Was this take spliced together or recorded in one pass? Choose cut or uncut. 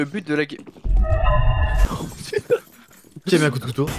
uncut